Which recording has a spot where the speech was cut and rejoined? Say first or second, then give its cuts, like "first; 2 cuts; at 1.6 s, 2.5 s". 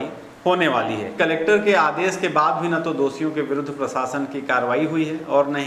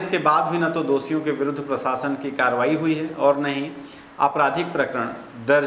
first; 1 cut; at 1.2 s